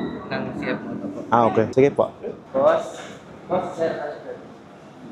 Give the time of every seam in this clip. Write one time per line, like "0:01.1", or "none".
none